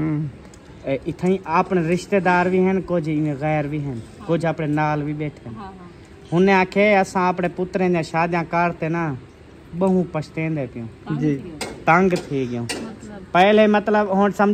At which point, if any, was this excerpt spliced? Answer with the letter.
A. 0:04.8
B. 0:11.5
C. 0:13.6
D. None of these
B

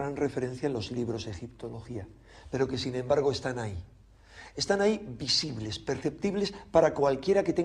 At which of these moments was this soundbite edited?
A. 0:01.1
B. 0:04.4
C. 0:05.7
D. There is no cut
C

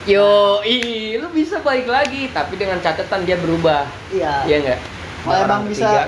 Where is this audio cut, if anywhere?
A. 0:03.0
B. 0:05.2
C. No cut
B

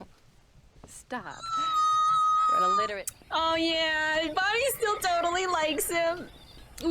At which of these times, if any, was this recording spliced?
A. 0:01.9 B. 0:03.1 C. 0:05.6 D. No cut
B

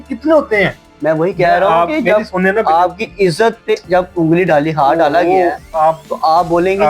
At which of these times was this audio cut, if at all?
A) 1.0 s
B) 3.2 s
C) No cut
C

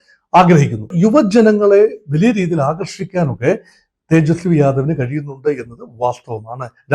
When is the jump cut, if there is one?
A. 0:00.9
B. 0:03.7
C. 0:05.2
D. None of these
A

